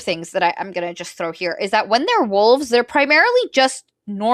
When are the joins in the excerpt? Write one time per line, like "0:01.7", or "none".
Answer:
none